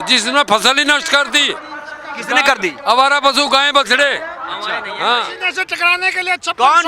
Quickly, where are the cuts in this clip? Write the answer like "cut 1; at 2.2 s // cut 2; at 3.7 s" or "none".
cut 1; at 5.4 s